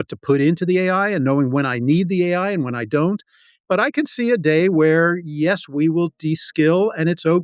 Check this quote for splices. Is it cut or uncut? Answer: cut